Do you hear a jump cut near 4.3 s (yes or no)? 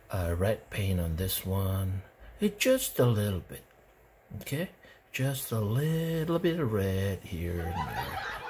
no